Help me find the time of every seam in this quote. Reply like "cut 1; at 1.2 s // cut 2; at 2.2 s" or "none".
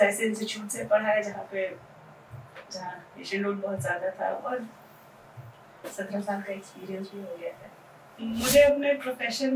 cut 1; at 8.2 s